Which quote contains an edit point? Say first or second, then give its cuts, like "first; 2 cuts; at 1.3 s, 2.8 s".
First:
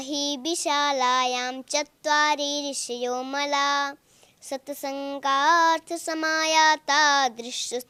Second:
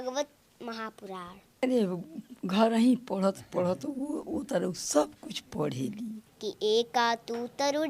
second; 2 cuts; at 1.6 s, 6.2 s